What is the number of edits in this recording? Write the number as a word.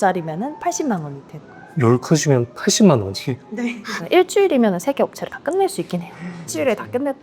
one